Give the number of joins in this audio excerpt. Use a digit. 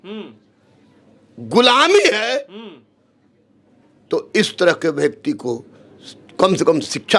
0